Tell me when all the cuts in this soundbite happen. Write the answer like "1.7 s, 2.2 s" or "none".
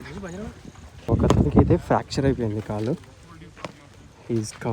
1.0 s